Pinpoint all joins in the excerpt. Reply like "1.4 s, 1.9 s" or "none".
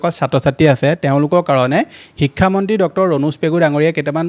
none